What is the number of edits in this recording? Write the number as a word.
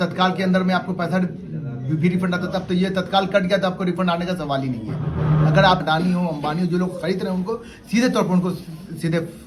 one